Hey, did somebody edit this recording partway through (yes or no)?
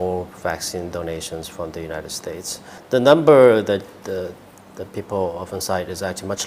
yes